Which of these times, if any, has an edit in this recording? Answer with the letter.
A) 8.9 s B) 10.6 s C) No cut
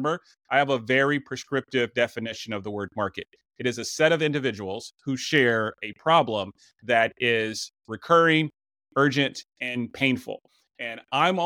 C